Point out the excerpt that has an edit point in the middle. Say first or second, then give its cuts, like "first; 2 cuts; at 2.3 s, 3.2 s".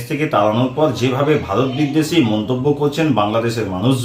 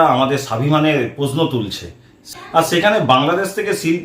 second; 1 cut; at 2.2 s